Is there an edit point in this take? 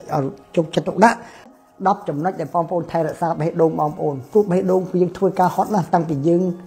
yes; 1 cut; at 1.5 s

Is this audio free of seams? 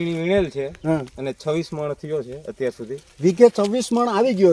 yes; 0 cuts

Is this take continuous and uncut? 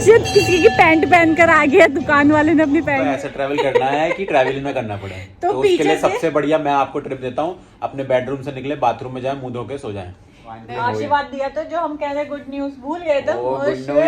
no; 2 cuts; at 3.0 s, 10.7 s

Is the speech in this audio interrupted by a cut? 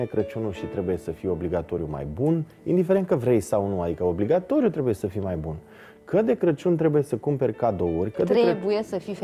no; 0 cuts

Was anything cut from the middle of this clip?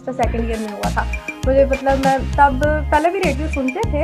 no; 0 cuts

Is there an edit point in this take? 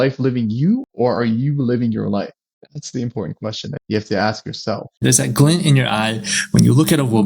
yes; 4 cuts; at 0.9 s, 2.5 s, 3.8 s, 5.0 s

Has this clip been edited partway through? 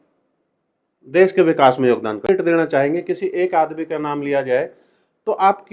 yes; 1 cut; at 2.3 s

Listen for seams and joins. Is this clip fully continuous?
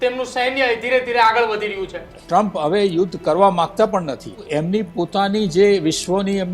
no; 2 cuts; at 2.1 s, 4.4 s

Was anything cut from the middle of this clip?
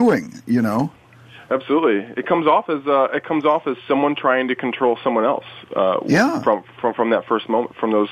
no; 0 cuts

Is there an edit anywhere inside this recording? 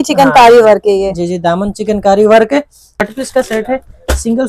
yes; 1 cut; at 3.0 s

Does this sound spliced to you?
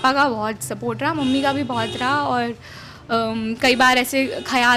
no; 0 cuts

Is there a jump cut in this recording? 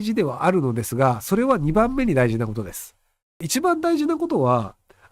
yes; 1 cut; at 3.4 s

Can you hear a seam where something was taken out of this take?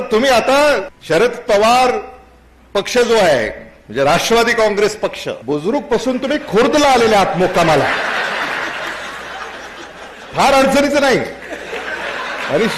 yes; 2 cuts; at 0.9 s, 5.3 s

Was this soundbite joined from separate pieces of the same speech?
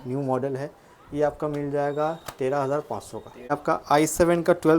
yes; 1 cut; at 3.5 s

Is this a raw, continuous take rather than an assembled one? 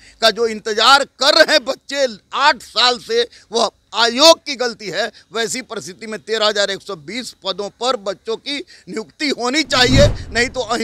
yes; 0 cuts

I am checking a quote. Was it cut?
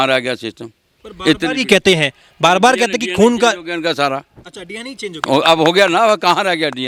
no; 0 cuts

